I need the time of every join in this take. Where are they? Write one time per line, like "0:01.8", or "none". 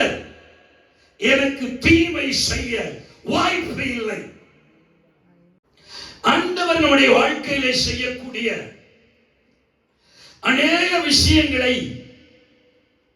0:05.6